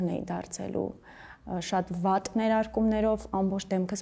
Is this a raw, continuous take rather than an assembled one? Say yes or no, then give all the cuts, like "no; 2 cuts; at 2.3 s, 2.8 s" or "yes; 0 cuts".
yes; 0 cuts